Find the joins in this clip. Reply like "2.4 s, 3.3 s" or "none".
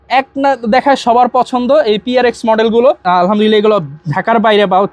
3.0 s